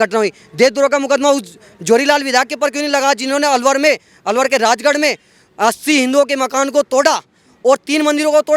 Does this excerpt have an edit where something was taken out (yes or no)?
no